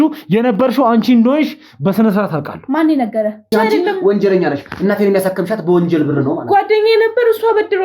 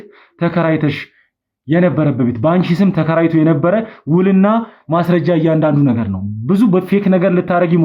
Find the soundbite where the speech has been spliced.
first; 1 cut; at 3.5 s

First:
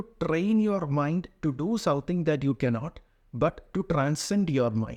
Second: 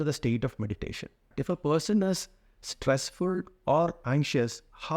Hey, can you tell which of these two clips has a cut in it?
second; 2 cuts; at 1.2 s, 4.0 s

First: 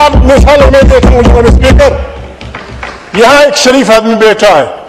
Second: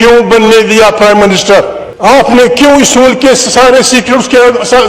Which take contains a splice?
second; 1 cut; at 1.8 s

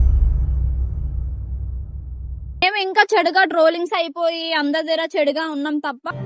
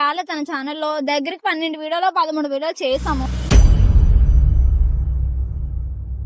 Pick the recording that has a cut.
first; 1 cut; at 2.6 s

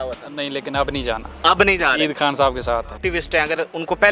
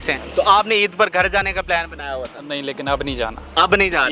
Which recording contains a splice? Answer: first; 1 cut; at 3.0 s

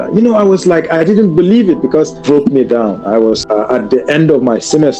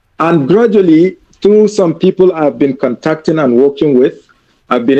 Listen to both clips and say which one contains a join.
first; 2 cuts; at 2.2 s, 3.4 s

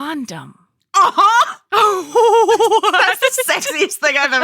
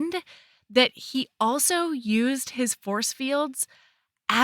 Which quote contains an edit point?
first; 1 cut; at 1.6 s

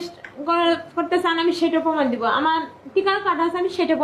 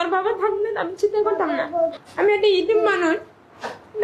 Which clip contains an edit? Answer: second; 1 cut; at 2.0 s

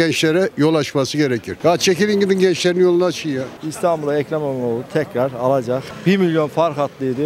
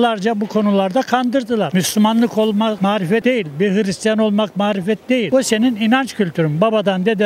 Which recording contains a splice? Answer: first; 2 cuts; at 1.6 s, 3.5 s

